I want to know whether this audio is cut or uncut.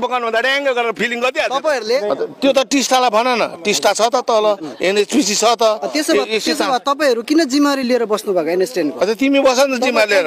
cut